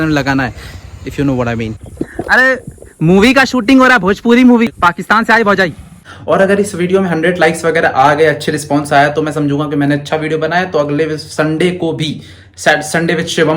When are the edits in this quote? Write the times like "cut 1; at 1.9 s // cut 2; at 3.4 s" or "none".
cut 1; at 1.8 s // cut 2; at 4.7 s // cut 3; at 6.1 s